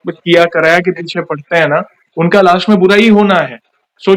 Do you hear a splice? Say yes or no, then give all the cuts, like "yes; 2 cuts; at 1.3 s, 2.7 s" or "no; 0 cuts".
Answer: no; 0 cuts